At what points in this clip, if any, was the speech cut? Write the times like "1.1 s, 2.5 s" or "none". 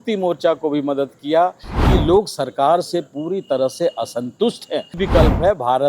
1.7 s, 5.0 s